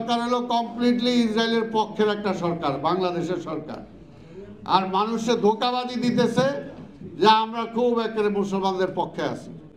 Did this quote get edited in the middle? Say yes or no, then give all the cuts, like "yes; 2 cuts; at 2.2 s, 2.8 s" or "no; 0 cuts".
no; 0 cuts